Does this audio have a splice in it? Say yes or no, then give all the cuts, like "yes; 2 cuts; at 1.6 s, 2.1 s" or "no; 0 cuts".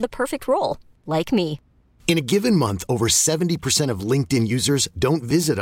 no; 0 cuts